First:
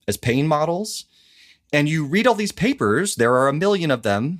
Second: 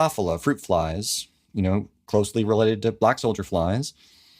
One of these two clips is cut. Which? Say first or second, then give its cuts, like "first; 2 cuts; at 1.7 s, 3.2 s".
second; 1 cut; at 2.0 s